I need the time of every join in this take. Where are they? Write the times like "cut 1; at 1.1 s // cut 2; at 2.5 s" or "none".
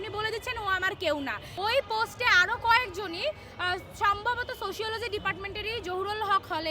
cut 1; at 1.4 s